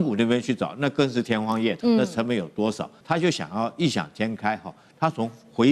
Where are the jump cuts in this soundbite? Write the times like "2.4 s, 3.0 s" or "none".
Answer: 1.8 s, 2.9 s